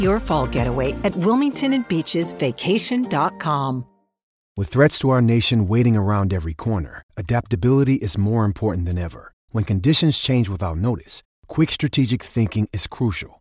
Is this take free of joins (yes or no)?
no